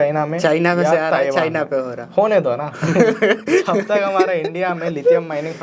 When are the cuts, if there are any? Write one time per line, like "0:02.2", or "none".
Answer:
none